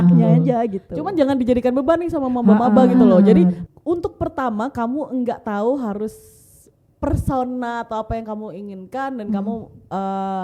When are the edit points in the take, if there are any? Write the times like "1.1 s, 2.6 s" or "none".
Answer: 3.6 s